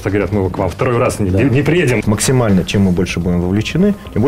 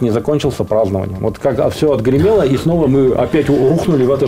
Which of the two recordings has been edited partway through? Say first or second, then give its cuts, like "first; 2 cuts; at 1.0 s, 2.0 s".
first; 1 cut; at 2.0 s